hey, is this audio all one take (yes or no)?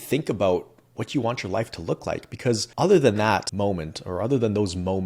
no